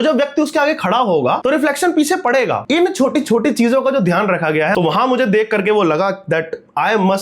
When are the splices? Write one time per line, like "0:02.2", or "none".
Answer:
0:01.4
0:02.6